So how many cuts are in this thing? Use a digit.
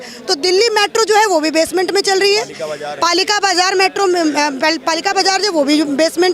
0